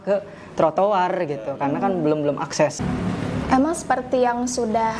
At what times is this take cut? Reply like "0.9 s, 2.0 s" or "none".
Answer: 2.8 s